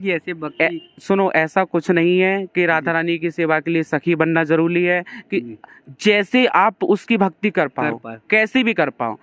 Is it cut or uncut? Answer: uncut